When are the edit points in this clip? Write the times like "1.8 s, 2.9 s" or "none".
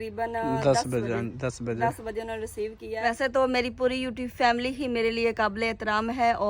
2.9 s